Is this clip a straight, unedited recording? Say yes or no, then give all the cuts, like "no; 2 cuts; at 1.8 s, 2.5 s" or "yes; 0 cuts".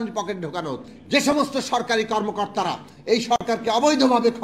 no; 1 cut; at 0.9 s